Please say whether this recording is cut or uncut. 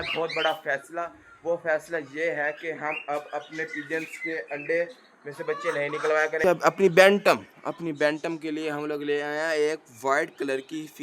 cut